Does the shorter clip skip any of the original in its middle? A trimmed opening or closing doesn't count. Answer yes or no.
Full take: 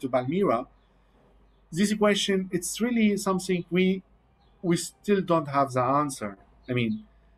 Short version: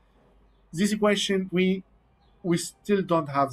yes